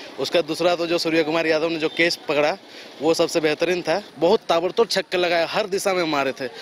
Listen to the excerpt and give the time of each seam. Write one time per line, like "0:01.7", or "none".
0:04.1